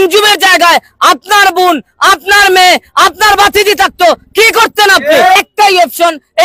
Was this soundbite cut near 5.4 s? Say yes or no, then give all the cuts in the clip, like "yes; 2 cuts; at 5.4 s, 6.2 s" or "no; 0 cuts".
yes; 1 cut; at 5.4 s